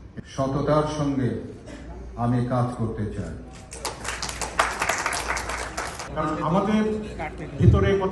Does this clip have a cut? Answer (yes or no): yes